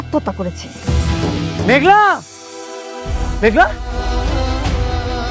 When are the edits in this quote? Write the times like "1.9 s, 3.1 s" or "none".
1.6 s, 3.2 s